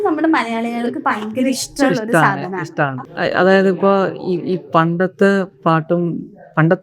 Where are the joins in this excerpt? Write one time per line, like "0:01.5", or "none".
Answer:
0:03.0